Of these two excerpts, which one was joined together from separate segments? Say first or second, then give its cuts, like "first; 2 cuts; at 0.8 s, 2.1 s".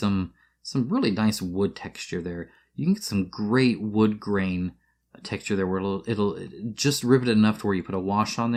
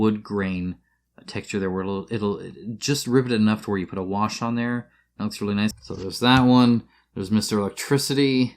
second; 1 cut; at 5.8 s